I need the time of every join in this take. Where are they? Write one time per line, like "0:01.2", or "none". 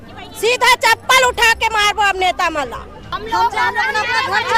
0:03.1